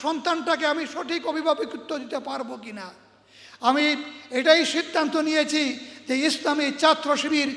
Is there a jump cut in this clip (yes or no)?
no